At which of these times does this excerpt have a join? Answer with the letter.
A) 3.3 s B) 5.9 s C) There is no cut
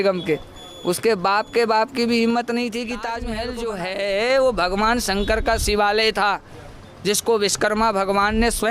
A